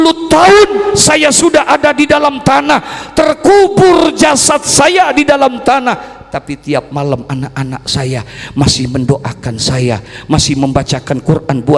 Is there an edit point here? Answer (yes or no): no